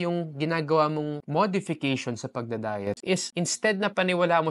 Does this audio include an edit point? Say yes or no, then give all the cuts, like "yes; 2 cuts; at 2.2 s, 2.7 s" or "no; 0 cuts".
yes; 1 cut; at 3.0 s